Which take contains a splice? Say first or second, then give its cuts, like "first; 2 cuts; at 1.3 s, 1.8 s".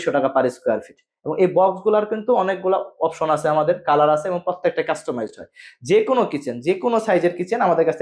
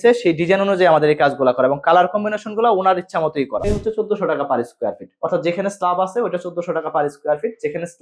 second; 1 cut; at 3.7 s